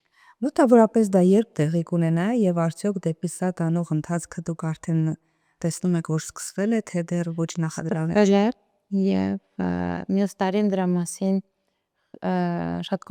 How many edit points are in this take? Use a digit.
0